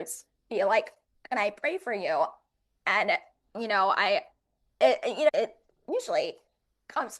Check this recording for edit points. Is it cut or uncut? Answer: cut